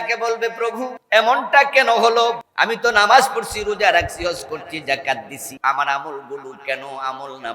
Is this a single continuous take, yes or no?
no